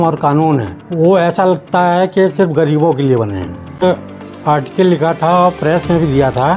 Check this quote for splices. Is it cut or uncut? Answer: cut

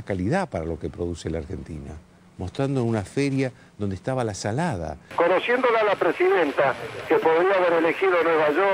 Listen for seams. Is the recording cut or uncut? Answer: cut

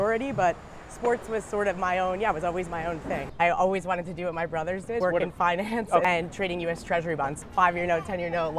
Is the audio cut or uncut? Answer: cut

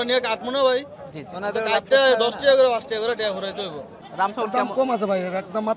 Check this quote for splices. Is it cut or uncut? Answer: cut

